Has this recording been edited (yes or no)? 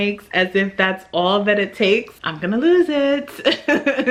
no